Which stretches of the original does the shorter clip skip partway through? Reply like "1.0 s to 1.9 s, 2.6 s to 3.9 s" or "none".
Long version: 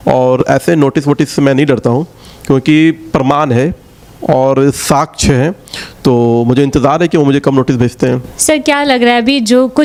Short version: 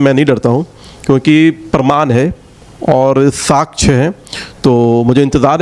none